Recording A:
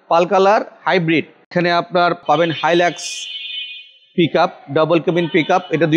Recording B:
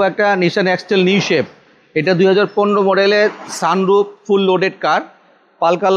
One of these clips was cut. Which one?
A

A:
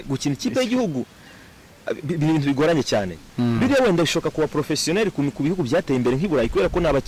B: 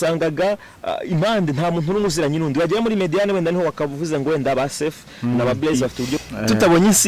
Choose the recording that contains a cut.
B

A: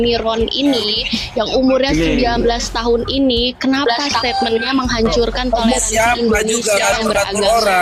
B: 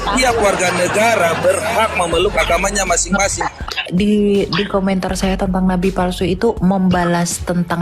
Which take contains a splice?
B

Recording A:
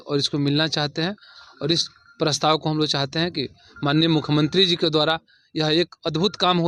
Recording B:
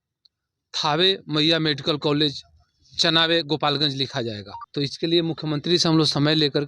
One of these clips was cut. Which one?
B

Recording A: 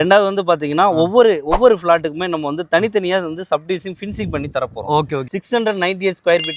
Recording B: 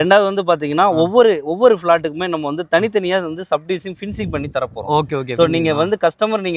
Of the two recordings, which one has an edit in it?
A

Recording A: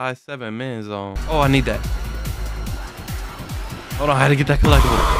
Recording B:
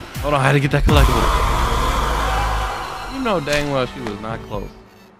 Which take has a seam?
A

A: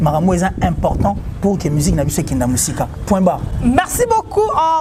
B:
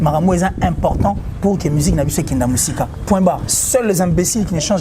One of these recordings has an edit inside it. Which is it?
B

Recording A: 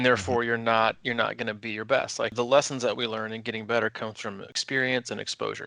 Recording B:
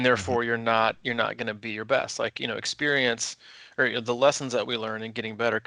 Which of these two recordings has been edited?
A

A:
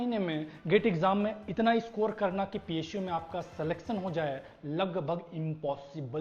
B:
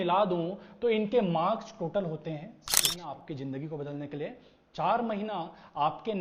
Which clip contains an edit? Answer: B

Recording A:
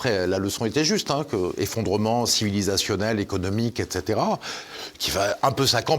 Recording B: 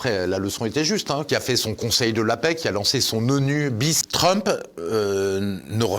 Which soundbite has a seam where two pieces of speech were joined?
B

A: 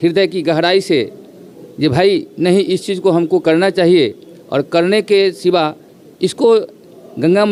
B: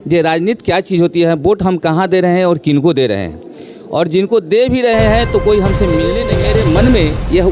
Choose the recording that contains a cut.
B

